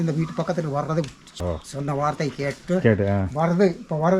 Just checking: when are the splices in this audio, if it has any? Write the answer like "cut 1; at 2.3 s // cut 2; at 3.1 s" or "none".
cut 1; at 1.4 s

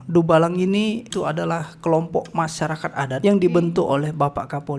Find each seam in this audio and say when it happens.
cut 1; at 1.1 s // cut 2; at 3.1 s

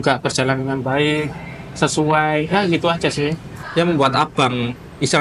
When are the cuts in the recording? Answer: cut 1; at 3.5 s

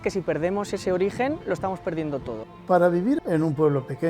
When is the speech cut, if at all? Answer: cut 1; at 2.4 s // cut 2; at 3.2 s

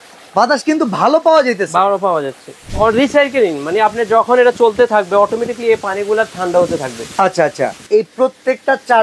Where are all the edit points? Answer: cut 1; at 2.6 s // cut 2; at 7.8 s

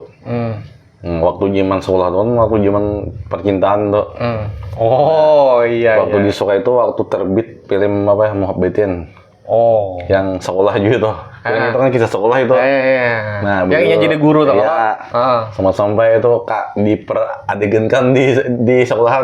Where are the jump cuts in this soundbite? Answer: none

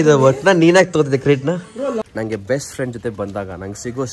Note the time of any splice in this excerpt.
cut 1; at 2.0 s

